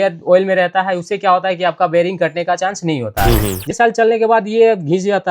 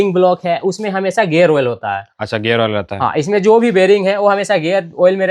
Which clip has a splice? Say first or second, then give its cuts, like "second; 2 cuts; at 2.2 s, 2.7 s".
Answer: first; 1 cut; at 3.7 s